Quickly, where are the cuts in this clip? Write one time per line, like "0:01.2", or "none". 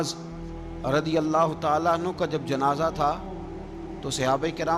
none